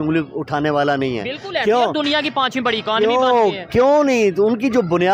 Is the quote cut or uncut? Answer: uncut